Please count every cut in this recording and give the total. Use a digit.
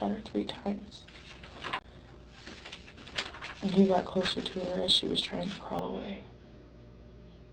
1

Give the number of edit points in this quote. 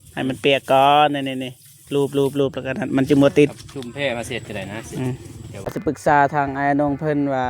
1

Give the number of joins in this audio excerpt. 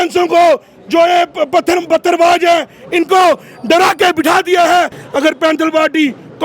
1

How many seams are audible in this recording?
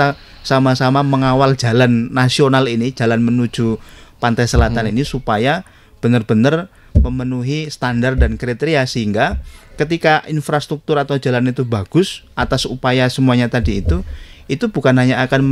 0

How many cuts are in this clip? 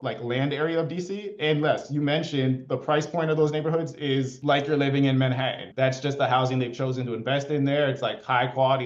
1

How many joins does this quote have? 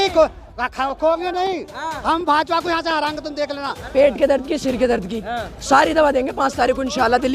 1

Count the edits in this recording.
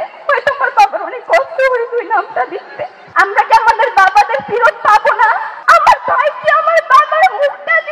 2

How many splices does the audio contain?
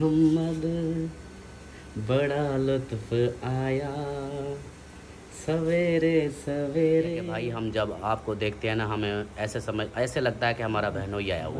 1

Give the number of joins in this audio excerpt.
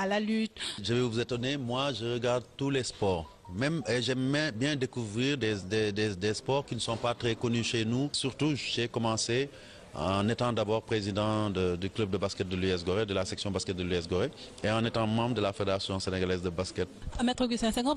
0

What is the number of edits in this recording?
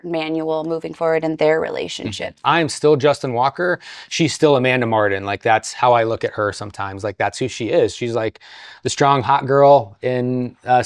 1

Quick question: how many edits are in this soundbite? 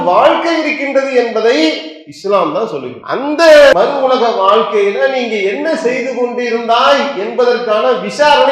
2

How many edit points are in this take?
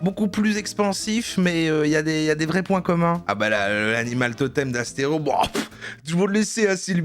1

